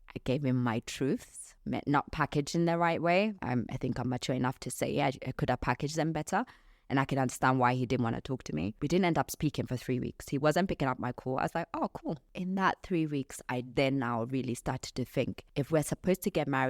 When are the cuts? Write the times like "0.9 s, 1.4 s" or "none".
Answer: 3.4 s, 8.8 s, 12.3 s, 15.4 s